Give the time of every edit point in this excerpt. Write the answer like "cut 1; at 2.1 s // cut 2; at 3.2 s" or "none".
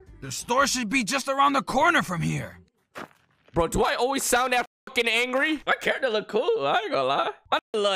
cut 1; at 5.6 s